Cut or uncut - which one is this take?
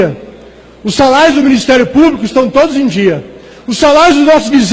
cut